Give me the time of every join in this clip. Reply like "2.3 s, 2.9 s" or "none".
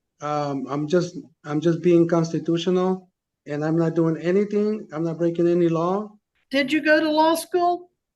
6.2 s